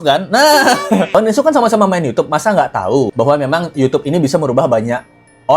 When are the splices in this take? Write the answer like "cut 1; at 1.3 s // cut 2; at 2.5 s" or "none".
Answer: cut 1; at 1.1 s